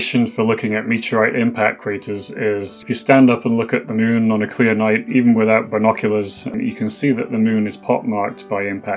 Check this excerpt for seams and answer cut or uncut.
cut